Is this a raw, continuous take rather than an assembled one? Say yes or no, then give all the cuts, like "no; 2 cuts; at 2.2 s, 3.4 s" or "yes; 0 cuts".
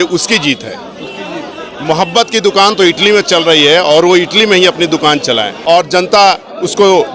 no; 1 cut; at 5.6 s